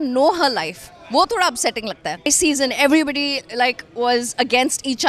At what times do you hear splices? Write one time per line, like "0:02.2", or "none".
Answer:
0:02.3